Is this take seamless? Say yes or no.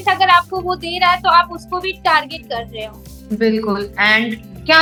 yes